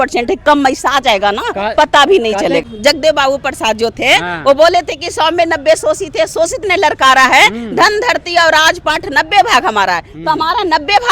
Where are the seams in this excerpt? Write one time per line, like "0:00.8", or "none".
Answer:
0:02.6